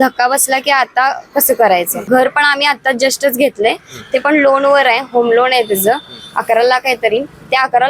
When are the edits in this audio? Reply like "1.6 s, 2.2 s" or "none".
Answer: 1.9 s

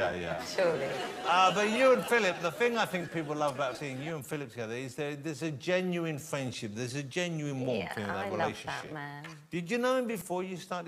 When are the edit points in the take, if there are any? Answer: 4.5 s

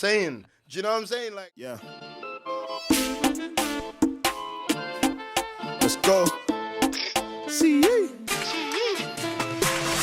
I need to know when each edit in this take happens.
1.3 s

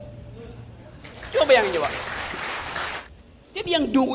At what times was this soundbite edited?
1.1 s, 3.0 s

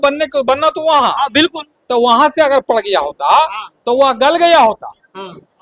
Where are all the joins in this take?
none

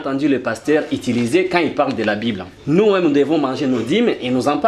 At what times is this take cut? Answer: 2.5 s

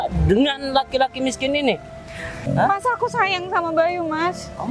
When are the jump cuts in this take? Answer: 2.4 s

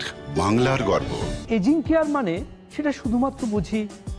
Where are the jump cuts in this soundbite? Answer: 1.3 s

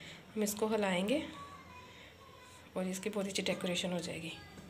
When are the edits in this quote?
none

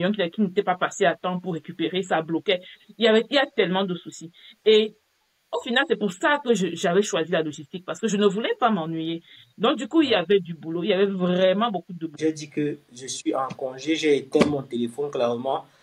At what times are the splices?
12.1 s

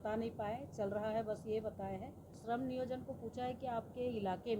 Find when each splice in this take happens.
2.3 s

